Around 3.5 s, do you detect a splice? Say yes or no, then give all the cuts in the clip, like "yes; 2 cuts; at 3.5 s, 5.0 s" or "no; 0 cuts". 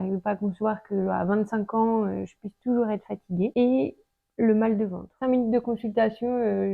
yes; 2 cuts; at 3.5 s, 5.0 s